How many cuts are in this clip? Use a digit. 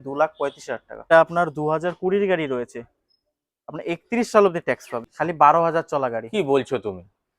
2